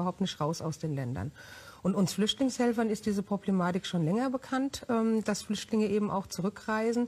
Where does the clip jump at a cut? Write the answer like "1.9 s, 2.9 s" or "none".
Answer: none